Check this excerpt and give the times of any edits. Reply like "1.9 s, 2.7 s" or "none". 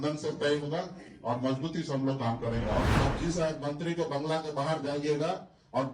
2.9 s